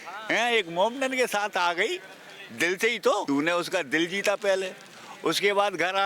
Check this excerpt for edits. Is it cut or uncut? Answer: cut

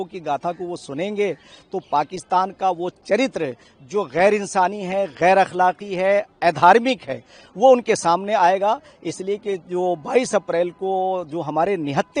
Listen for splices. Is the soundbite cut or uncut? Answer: uncut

